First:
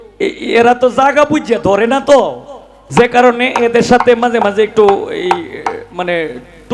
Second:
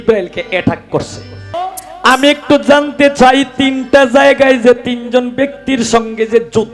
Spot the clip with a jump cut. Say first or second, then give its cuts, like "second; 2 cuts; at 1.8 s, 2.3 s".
second; 1 cut; at 1.5 s